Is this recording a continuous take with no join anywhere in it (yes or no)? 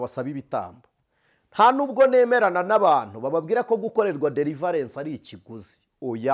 yes